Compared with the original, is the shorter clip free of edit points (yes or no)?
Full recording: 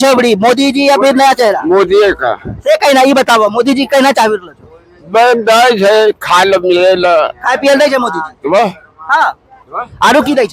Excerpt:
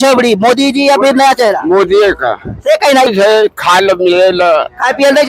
no